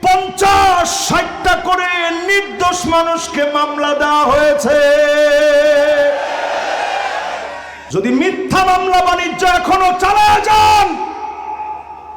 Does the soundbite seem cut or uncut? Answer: cut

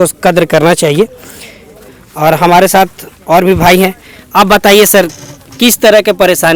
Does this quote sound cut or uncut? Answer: uncut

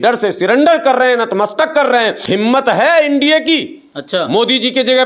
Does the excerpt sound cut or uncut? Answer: cut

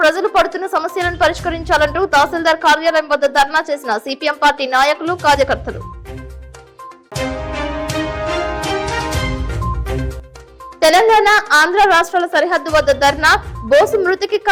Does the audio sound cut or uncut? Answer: uncut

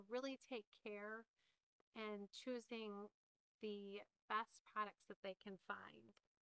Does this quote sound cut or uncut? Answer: uncut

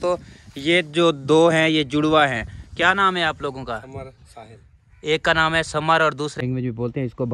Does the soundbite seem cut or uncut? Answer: cut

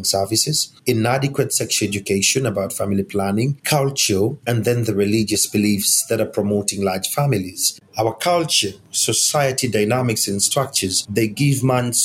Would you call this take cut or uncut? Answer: cut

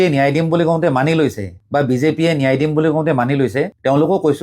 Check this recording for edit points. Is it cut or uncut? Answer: uncut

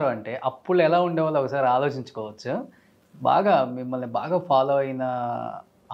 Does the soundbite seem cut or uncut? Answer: uncut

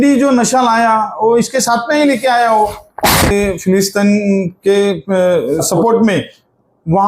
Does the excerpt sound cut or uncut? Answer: cut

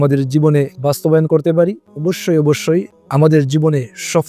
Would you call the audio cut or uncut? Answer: cut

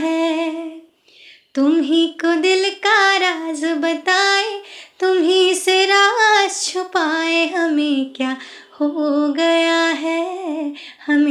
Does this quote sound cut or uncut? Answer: uncut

